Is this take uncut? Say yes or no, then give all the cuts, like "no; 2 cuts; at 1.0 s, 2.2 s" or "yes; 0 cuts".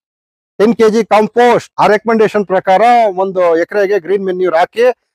no; 1 cut; at 1.7 s